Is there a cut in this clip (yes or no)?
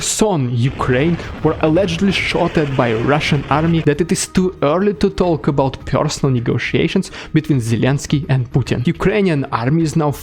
yes